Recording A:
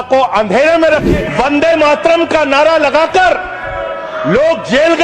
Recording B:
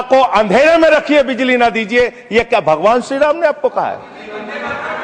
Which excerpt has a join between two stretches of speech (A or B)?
A